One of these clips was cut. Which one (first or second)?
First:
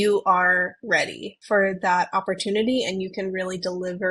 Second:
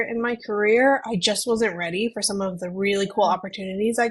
first